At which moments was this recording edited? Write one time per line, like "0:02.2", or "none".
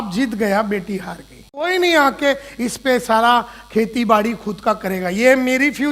0:01.7

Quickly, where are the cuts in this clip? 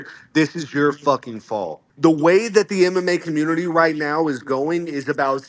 0:01.8

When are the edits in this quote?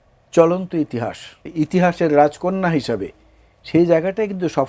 0:01.5

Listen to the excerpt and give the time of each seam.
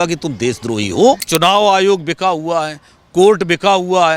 0:01.2

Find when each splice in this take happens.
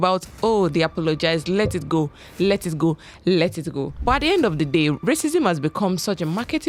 none

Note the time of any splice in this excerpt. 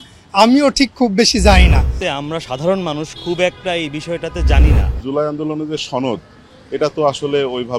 0:02.0
0:05.0

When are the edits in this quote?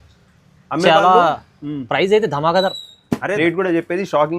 0:03.4

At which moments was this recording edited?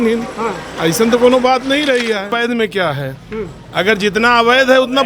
0:02.3

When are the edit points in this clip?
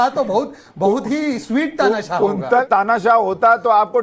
0:02.7

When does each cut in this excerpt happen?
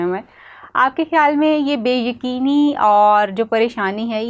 none

